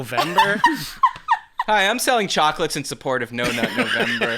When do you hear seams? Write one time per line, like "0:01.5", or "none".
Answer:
none